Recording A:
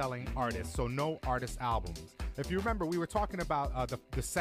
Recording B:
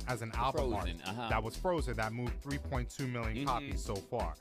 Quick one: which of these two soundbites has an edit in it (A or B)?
B